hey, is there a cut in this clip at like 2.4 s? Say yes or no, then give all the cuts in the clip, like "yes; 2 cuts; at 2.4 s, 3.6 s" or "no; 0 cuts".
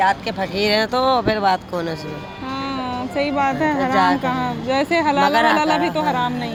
no; 0 cuts